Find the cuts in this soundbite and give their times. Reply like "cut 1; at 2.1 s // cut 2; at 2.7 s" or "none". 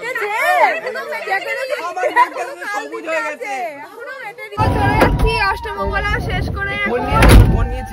cut 1; at 4.6 s